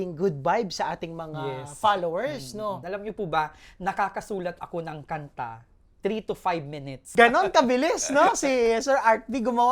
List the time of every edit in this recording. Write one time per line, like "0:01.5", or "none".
0:02.8
0:07.1